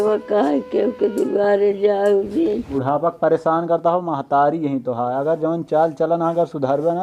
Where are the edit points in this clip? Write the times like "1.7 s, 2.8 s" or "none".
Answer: 2.7 s